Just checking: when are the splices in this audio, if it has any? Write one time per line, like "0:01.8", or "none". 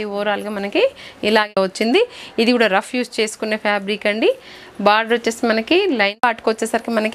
0:01.5
0:06.2